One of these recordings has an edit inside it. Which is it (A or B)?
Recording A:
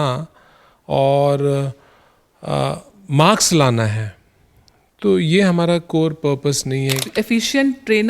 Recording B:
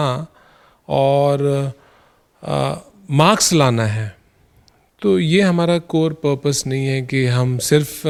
A